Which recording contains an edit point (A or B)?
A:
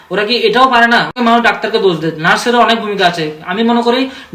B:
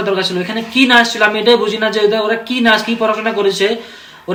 A